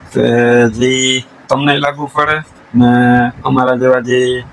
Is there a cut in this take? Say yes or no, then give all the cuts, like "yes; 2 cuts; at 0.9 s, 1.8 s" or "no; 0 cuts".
no; 0 cuts